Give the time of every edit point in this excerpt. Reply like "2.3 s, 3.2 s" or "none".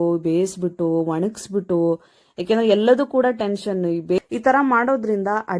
4.2 s